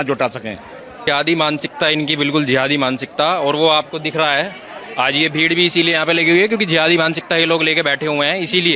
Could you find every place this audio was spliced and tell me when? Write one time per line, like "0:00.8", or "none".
0:01.0